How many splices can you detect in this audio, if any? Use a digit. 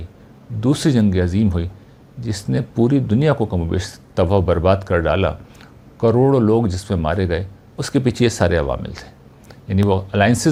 0